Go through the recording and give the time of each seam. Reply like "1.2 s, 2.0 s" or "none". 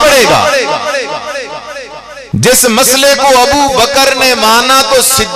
2.1 s